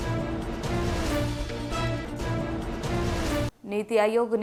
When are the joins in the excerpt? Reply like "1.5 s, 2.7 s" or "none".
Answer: none